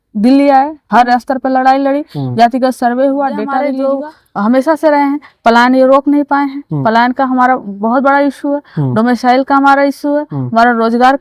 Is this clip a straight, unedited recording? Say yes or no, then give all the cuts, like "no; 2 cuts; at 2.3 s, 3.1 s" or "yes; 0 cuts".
no; 1 cut; at 3.7 s